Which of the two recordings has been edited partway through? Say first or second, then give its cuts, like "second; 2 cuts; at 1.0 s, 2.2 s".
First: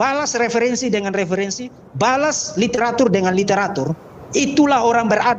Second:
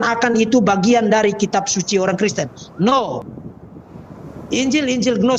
second; 1 cut; at 3.2 s